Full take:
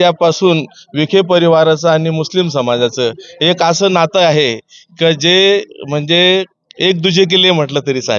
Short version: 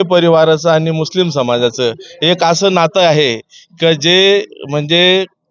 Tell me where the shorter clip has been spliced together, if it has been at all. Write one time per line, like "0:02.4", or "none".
none